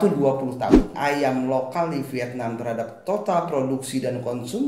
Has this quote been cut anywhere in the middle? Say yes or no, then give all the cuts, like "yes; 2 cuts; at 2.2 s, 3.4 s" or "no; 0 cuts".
yes; 1 cut; at 0.9 s